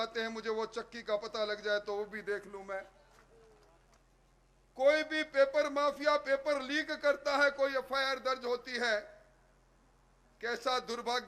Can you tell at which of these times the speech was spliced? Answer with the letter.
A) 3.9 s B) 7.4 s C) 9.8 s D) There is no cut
A